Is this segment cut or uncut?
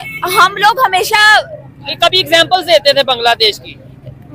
uncut